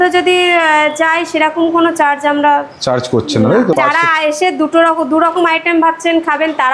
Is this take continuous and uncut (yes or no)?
no